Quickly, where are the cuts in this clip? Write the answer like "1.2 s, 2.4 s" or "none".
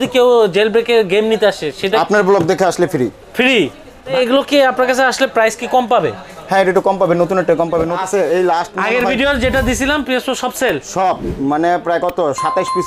4.1 s, 8.0 s